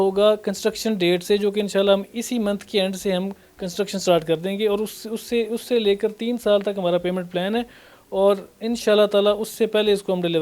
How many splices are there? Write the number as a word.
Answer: zero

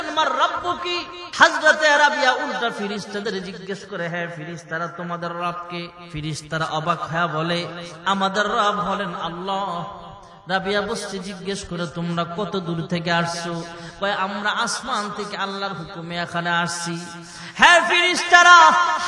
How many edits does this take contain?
two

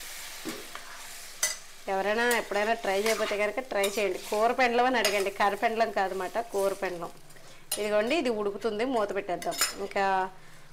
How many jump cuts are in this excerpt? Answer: zero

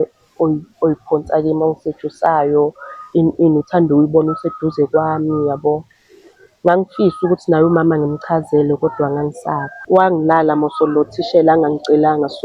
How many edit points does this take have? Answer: one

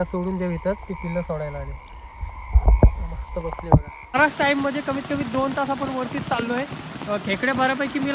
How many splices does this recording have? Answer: one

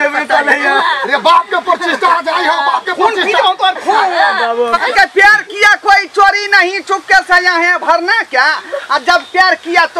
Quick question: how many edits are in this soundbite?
one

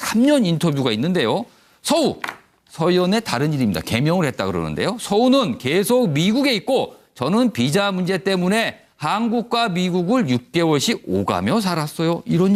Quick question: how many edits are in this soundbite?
zero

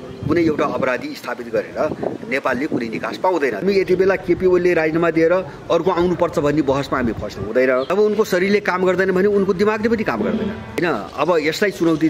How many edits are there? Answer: three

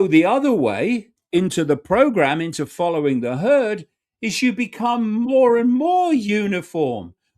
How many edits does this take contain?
one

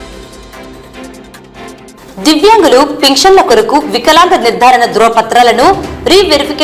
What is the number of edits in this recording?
zero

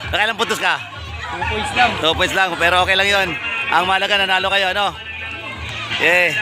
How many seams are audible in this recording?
zero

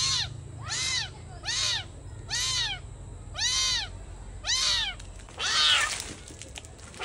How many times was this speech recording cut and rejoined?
one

